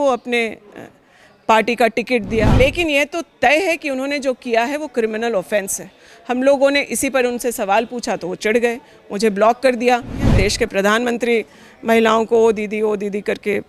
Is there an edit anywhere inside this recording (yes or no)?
yes